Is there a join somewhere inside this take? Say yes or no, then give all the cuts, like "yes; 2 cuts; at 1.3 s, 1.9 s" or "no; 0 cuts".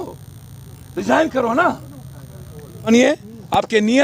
yes; 1 cut; at 2.9 s